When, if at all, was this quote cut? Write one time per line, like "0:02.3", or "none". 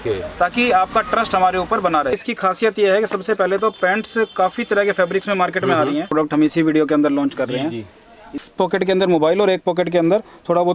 0:02.2
0:06.1
0:08.4